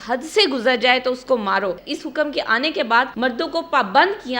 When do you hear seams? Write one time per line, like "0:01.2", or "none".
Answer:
0:01.9
0:03.1